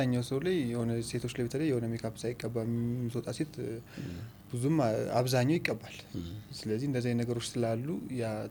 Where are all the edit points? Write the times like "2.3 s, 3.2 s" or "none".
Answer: none